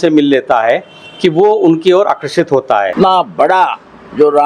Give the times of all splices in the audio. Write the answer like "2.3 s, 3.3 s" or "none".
2.9 s